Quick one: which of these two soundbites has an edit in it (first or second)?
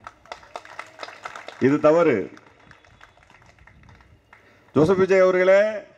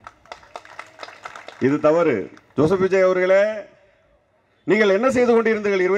second